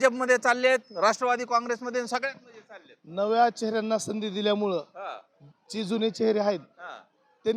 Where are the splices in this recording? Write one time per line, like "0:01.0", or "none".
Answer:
none